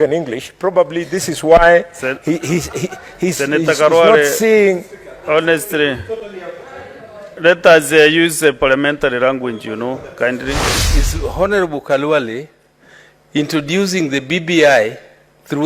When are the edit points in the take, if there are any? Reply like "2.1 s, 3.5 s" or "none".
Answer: 10.8 s